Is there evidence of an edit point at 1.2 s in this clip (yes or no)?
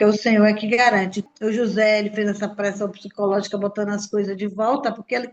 yes